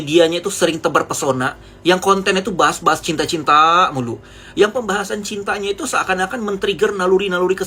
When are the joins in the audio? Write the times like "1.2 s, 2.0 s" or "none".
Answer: none

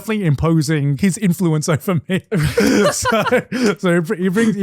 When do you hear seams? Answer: 0.9 s

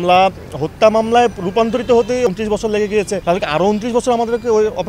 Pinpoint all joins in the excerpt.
2.3 s

